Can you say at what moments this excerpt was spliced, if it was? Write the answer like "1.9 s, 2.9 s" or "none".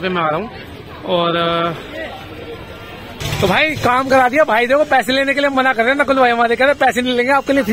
3.2 s